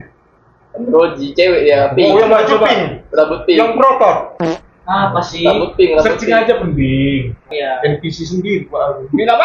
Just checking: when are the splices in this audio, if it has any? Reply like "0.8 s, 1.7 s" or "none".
7.5 s